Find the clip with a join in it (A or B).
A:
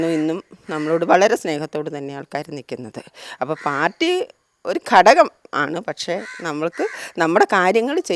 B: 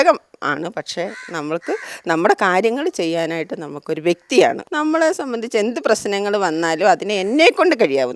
B